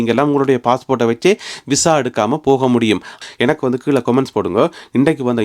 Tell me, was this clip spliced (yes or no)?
yes